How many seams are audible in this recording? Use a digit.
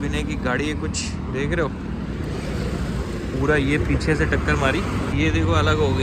1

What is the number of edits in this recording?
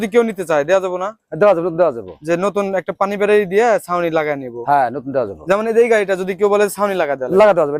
0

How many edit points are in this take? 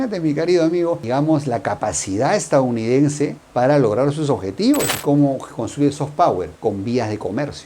1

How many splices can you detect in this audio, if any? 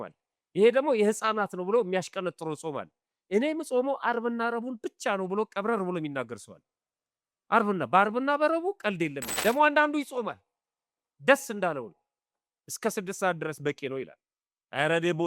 1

